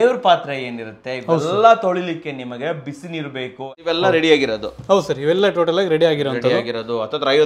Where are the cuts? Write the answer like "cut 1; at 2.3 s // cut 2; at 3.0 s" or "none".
cut 1; at 3.7 s